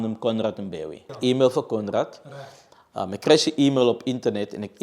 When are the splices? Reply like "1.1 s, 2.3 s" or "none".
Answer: 1.1 s

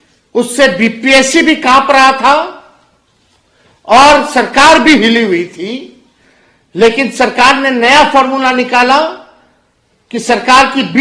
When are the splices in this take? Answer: none

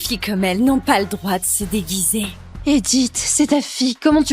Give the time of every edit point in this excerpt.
2.4 s

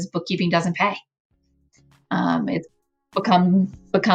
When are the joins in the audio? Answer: none

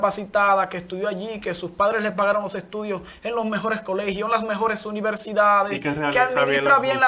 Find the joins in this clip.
none

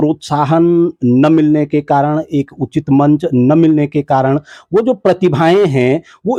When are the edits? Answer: none

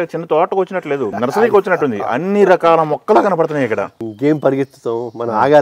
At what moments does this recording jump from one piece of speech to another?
1.1 s, 4.1 s

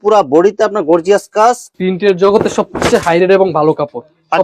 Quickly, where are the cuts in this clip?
1.7 s

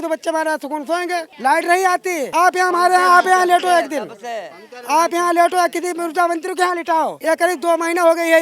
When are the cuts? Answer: 2.2 s, 7.2 s

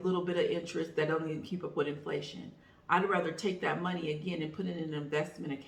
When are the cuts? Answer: none

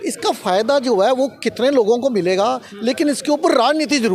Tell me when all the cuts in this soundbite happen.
none

